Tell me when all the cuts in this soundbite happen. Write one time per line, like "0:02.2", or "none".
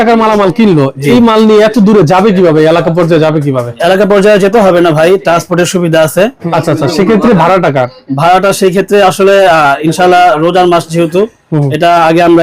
0:06.4